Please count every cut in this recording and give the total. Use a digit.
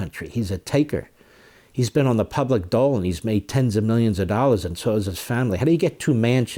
0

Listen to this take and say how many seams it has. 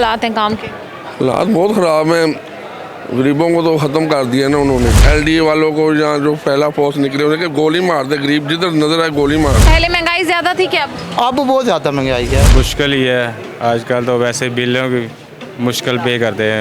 3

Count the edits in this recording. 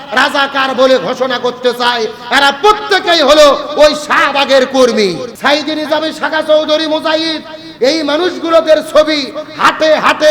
1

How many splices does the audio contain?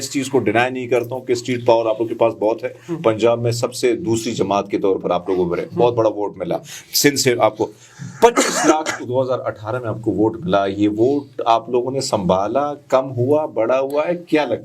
0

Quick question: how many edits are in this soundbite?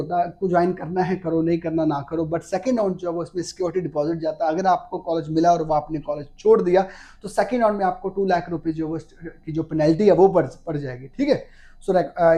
0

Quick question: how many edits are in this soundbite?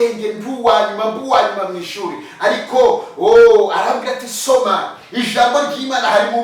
0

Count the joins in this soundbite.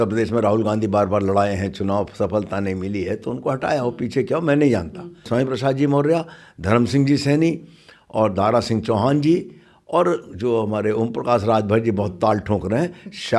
1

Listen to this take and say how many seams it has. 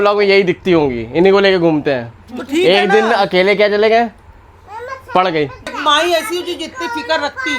1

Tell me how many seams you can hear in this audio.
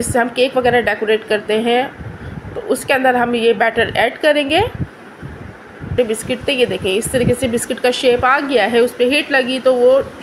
1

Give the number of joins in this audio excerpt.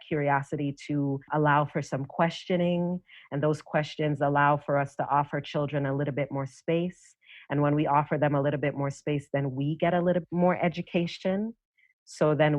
2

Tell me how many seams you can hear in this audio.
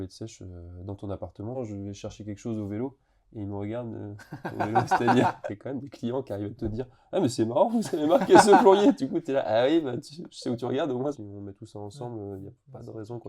3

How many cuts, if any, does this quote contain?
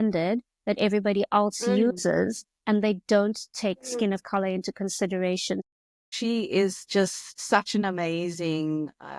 2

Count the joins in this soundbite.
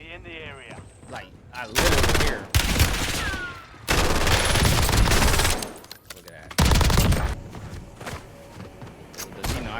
1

